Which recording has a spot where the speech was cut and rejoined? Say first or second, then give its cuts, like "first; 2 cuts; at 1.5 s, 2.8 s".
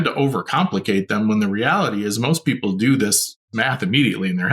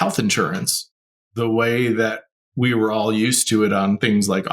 first; 1 cut; at 3.5 s